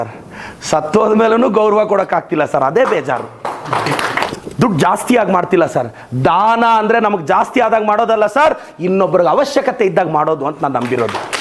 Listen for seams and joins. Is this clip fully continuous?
no; 1 cut; at 4.1 s

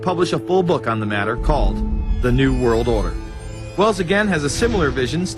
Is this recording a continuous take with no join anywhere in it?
no; 1 cut; at 1.0 s

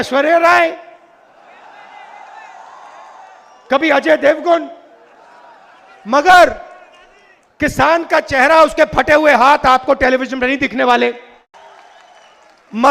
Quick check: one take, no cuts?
no; 1 cut; at 11.5 s

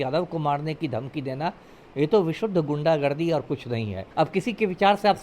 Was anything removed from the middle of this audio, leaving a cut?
yes; 1 cut; at 4.0 s

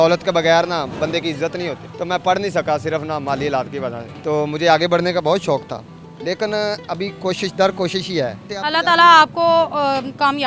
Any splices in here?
no; 0 cuts

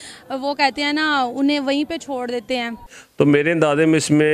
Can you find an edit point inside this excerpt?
yes; 1 cut; at 3.1 s

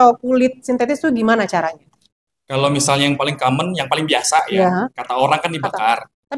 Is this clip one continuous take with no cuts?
yes; 0 cuts

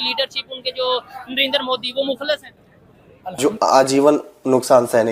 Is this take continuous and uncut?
no; 1 cut; at 3.4 s

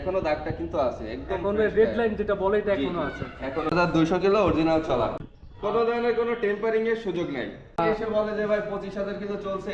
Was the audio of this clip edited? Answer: yes; 3 cuts; at 3.7 s, 5.3 s, 7.8 s

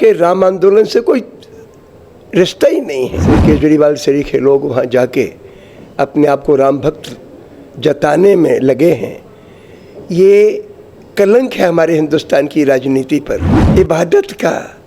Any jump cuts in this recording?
yes; 2 cuts; at 3.3 s, 13.5 s

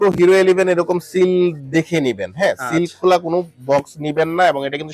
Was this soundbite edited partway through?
no; 0 cuts

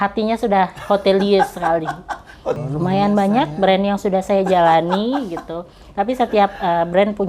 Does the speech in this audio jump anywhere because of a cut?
yes; 1 cut; at 2.6 s

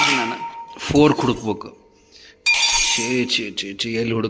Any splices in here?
no; 0 cuts

